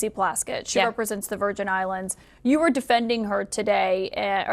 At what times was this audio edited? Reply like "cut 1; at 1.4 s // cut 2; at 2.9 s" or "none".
cut 1; at 2.3 s